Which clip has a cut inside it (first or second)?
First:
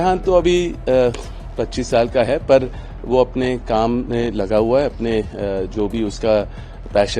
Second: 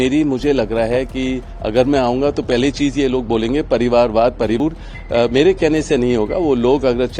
second